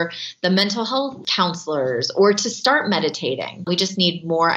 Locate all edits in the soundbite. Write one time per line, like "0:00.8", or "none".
0:01.2
0:03.6